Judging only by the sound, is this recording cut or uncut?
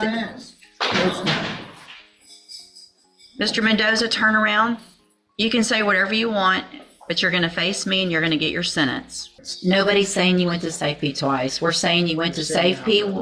cut